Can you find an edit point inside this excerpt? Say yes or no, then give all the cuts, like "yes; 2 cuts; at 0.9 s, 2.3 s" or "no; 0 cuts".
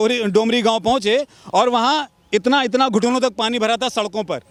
no; 0 cuts